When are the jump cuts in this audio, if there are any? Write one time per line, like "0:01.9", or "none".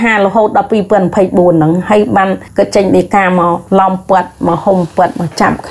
0:02.4
0:03.6